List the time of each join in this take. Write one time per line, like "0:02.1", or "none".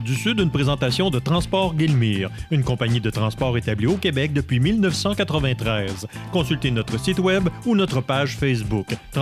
none